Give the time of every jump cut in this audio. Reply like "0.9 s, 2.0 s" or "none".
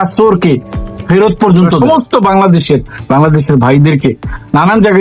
1.8 s